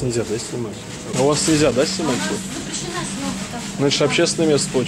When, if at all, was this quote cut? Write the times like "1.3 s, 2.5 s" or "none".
1.1 s